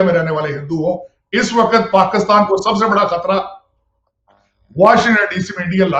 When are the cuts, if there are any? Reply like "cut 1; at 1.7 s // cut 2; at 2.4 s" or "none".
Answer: none